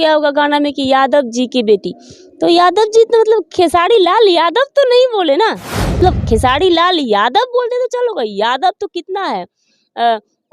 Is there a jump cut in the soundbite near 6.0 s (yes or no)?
yes